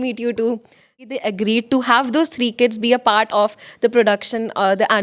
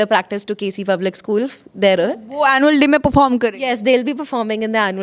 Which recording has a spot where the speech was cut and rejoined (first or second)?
first